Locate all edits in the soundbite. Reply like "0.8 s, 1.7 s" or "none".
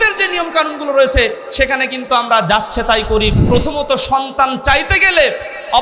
3.3 s